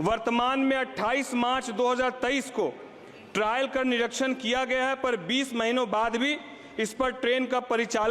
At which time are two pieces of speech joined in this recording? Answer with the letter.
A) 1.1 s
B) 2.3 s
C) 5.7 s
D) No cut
D